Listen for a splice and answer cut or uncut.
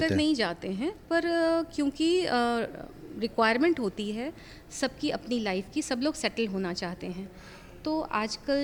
uncut